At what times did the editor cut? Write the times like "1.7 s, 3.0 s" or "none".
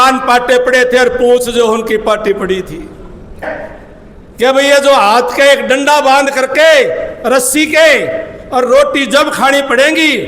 3.4 s